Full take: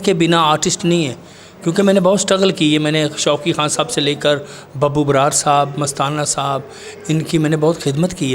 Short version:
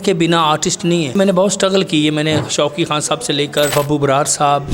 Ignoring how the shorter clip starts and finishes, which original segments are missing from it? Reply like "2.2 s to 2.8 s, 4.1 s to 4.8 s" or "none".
1.2 s to 1.8 s, 4.4 s to 4.8 s